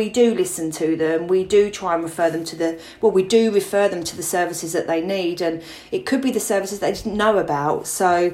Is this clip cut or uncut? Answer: uncut